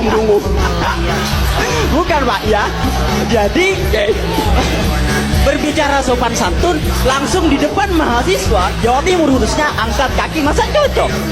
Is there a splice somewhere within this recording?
no; 0 cuts

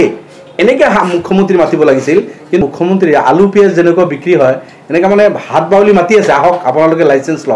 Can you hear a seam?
yes; 1 cut; at 2.6 s

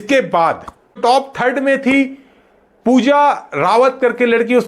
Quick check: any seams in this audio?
yes; 1 cut; at 1.0 s

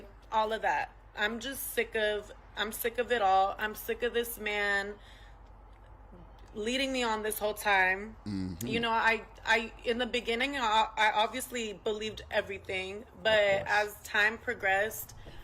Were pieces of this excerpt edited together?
yes; 1 cut; at 13.5 s

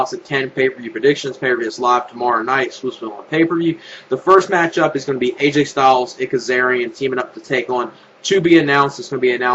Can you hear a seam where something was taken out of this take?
no; 0 cuts

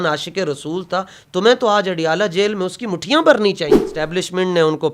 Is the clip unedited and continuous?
no; 1 cut; at 3.8 s

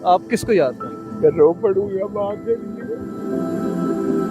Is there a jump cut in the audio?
yes; 1 cut; at 3.1 s

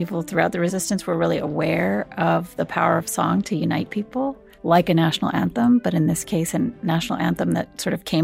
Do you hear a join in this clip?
yes; 2 cuts; at 0.8 s, 4.5 s

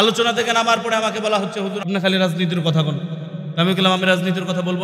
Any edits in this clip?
yes; 1 cut; at 1.9 s

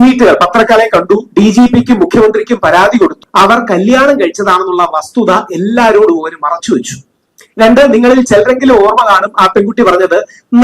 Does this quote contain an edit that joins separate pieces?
yes; 1 cut; at 3.1 s

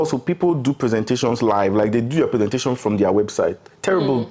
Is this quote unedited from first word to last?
yes; 0 cuts

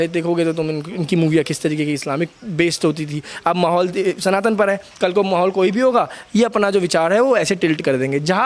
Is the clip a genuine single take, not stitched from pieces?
yes; 0 cuts

